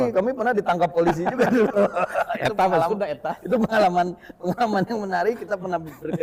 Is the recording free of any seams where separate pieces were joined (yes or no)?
yes